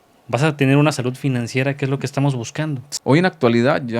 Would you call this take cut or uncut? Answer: cut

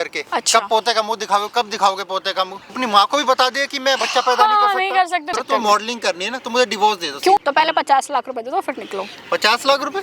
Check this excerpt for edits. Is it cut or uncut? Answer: cut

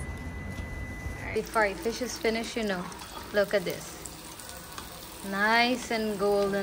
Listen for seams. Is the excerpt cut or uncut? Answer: cut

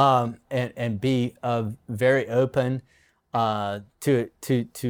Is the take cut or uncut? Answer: uncut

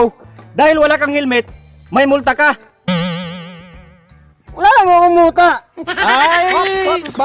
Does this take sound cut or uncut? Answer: uncut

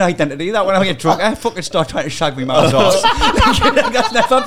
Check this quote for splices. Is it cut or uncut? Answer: uncut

